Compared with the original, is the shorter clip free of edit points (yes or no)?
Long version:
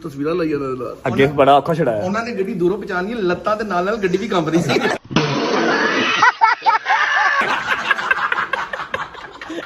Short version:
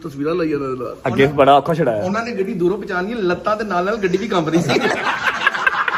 no